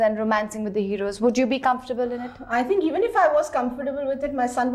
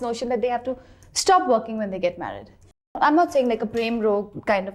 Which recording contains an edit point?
second; 1 cut; at 3.0 s

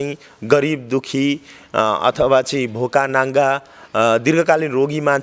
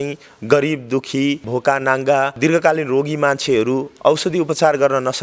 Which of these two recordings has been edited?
second; 2 cuts; at 1.5 s, 2.4 s

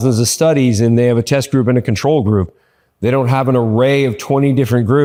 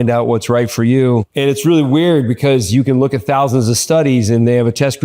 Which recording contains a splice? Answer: second; 1 cut; at 1.3 s

